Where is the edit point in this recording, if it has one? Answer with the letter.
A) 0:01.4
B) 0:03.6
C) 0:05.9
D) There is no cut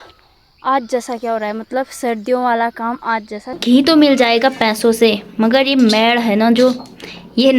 B